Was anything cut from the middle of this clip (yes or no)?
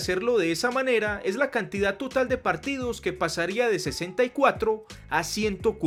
no